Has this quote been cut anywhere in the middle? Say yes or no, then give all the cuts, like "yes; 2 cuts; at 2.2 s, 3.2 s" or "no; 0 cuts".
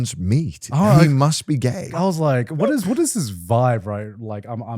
yes; 1 cut; at 1.9 s